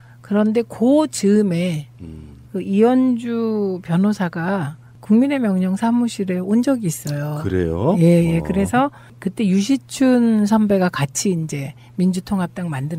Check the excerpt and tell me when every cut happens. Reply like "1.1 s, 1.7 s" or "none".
7.1 s